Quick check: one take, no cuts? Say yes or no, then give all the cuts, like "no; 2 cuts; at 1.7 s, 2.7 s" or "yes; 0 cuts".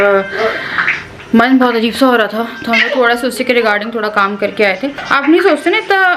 no; 1 cut; at 5.1 s